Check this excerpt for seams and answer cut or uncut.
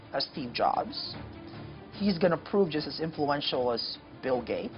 uncut